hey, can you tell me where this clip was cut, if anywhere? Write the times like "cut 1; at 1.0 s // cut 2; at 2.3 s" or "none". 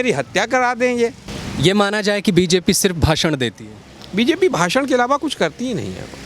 none